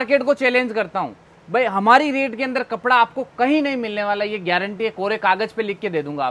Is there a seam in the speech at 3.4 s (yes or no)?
no